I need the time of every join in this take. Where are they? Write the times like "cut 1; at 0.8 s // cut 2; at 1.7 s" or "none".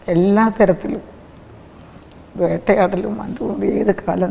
none